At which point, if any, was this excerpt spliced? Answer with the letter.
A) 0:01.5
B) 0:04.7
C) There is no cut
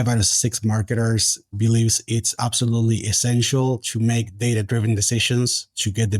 A